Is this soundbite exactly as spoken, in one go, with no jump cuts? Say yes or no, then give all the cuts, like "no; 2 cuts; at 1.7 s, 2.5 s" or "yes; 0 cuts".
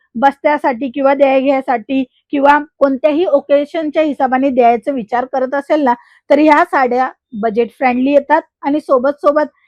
yes; 0 cuts